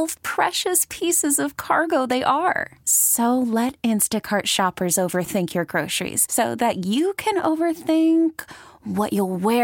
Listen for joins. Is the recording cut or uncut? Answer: uncut